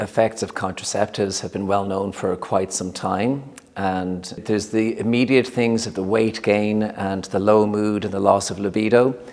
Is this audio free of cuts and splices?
no; 1 cut; at 4.4 s

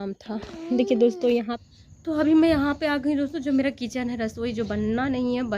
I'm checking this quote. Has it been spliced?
yes; 1 cut; at 1.6 s

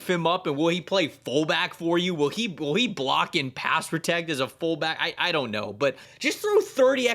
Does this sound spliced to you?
yes; 1 cut; at 6.1 s

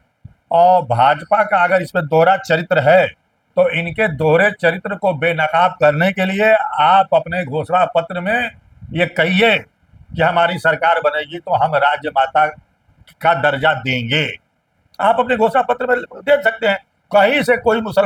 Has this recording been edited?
no; 0 cuts

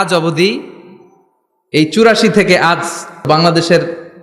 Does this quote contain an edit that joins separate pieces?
yes; 1 cut; at 3.2 s

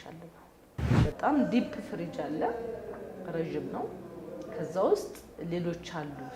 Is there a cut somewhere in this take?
yes; 1 cut; at 0.9 s

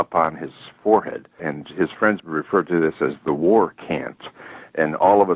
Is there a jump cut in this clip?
yes; 1 cut; at 2.2 s

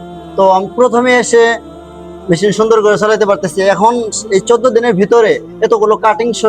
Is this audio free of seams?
yes; 0 cuts

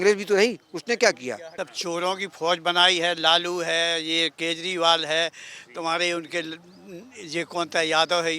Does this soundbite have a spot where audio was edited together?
yes; 1 cut; at 1.5 s

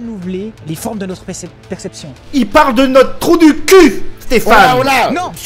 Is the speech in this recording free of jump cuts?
no; 1 cut; at 2.2 s

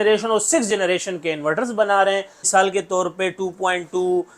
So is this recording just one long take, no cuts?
no; 1 cut; at 2.4 s

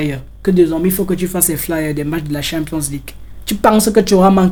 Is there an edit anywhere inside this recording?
no; 0 cuts

